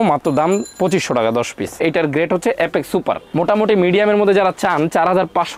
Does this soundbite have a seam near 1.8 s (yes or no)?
yes